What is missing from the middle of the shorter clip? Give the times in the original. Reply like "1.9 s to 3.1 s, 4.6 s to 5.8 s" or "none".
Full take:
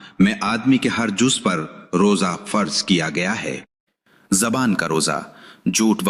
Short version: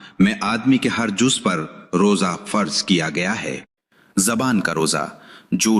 4.3 s to 4.4 s

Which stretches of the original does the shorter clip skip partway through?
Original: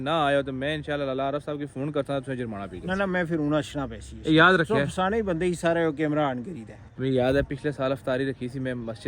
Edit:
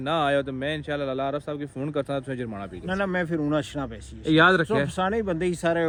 none

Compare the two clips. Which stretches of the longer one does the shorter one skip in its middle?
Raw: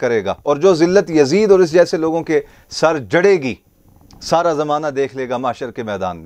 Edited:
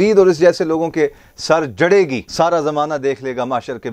3.5 s to 4.1 s

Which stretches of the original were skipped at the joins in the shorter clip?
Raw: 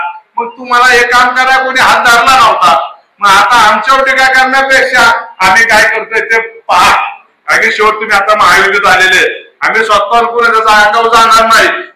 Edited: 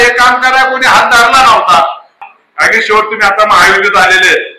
3.1 s to 7.1 s

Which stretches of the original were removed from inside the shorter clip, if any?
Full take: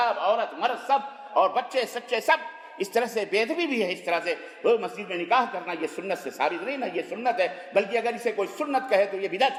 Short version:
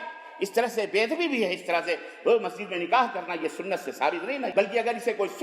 6.9 s to 7.7 s

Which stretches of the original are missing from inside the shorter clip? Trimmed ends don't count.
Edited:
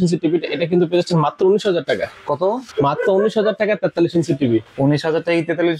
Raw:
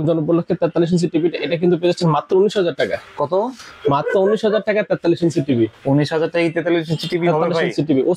3.6 s to 3.7 s

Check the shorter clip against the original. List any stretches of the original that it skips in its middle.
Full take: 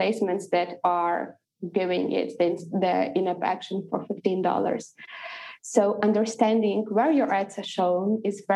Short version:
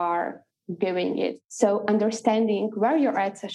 2.3 s to 5.5 s

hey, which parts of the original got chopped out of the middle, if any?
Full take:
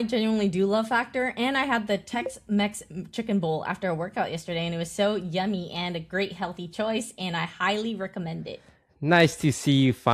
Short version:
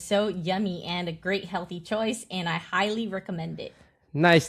none

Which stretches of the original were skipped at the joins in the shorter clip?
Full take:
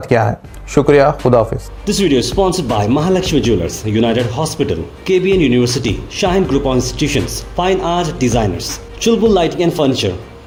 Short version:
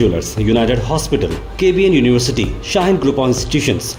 none

